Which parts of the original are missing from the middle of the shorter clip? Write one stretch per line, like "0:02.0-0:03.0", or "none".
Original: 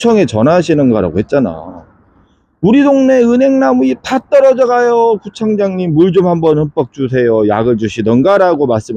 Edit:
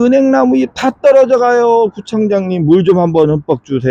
none